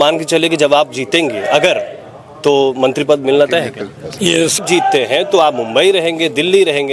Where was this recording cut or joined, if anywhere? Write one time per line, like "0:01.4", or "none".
0:04.6